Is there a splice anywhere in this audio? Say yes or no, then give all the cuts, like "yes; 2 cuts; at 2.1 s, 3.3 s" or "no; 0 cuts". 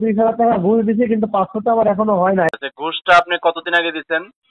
yes; 1 cut; at 2.5 s